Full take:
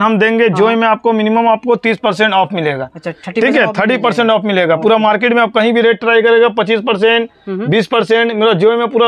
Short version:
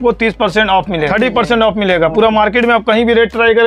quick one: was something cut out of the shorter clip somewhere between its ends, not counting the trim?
yes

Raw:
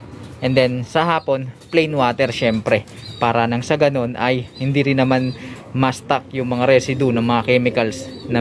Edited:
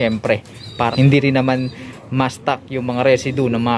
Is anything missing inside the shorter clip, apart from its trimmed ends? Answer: yes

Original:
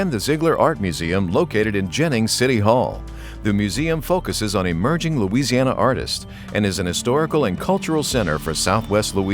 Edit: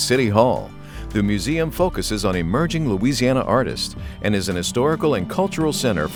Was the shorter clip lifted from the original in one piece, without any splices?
yes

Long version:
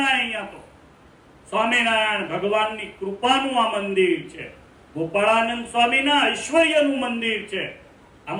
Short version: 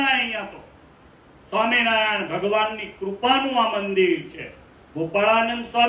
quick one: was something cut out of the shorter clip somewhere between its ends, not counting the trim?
no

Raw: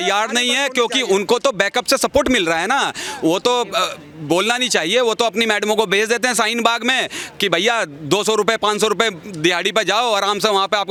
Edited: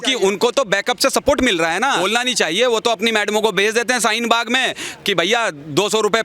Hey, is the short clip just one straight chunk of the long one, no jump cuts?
no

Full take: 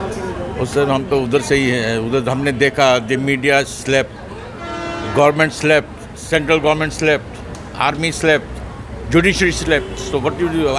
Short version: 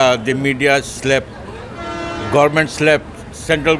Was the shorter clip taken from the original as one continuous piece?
yes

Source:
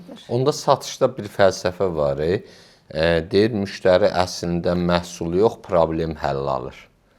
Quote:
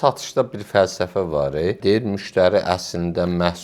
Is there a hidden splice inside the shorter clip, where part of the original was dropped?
yes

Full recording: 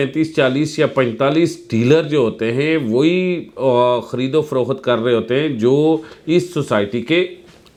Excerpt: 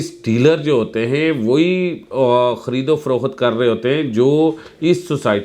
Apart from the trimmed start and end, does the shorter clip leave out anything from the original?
no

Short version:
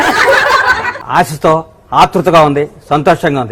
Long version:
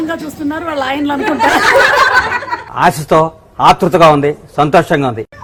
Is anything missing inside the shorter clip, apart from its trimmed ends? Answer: yes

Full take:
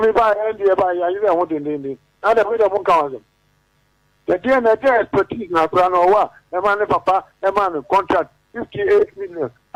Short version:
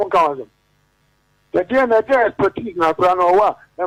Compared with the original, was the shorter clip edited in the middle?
no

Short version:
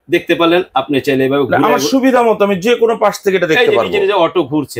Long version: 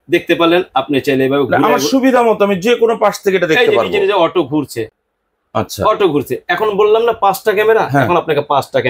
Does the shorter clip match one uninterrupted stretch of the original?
yes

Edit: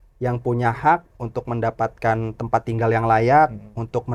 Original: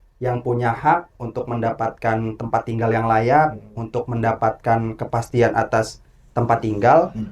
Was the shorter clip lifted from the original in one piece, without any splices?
yes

